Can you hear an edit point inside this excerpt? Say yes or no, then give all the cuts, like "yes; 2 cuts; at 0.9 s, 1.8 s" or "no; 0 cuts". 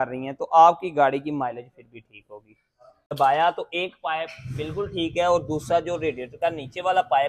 yes; 1 cut; at 3.0 s